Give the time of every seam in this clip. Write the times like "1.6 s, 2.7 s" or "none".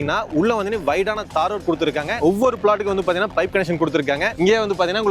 2.2 s